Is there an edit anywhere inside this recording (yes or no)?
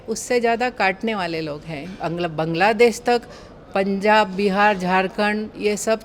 no